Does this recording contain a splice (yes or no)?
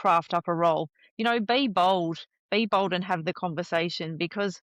no